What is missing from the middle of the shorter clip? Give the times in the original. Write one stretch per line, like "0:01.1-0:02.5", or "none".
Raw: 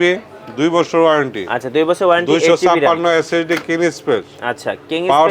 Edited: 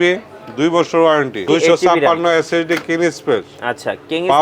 0:01.4-0:02.2